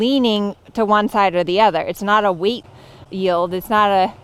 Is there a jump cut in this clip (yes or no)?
no